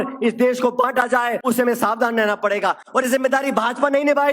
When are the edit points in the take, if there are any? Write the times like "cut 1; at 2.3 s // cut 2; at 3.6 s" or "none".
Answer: cut 1; at 1.4 s